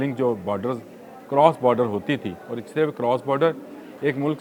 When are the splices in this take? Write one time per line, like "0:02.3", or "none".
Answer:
none